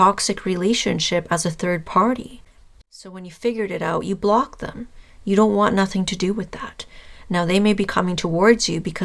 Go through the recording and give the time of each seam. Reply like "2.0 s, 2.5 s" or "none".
none